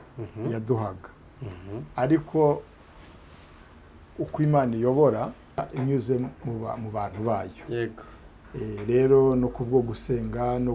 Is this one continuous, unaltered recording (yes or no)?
no